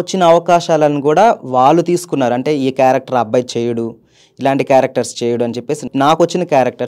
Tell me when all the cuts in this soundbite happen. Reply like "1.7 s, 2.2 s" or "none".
5.9 s